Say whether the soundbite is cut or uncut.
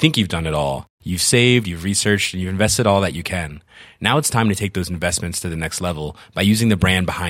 uncut